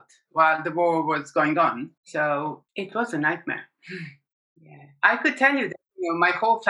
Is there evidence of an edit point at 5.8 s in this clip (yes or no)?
no